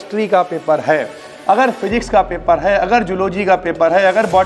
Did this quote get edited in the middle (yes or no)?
no